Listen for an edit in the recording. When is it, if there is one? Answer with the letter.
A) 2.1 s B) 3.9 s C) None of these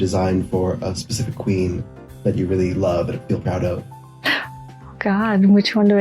B